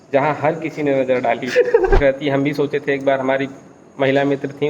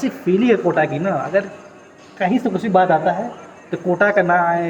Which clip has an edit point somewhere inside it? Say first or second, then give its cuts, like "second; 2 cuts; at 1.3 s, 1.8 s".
first; 1 cut; at 2.0 s